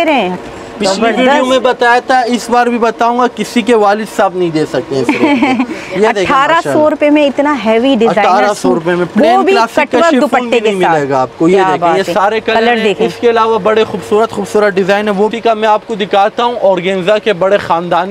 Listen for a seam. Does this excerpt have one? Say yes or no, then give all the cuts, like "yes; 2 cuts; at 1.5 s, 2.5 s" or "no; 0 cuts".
no; 0 cuts